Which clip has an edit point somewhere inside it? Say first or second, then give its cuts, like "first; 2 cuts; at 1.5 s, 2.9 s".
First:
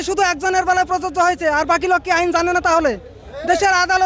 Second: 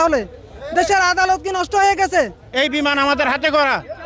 second; 1 cut; at 2.4 s